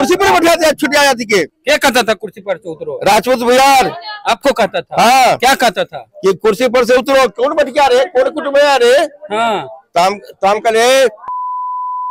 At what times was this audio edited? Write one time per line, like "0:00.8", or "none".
0:01.5